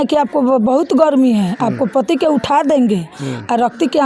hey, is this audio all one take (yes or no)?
yes